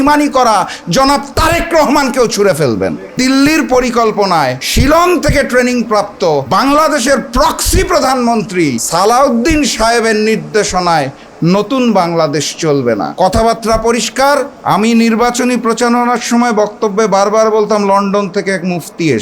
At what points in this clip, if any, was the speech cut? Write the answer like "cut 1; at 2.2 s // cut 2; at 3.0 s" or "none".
cut 1; at 3.2 s // cut 2; at 4.6 s // cut 3; at 6.5 s // cut 4; at 8.8 s // cut 5; at 13.1 s // cut 6; at 14.5 s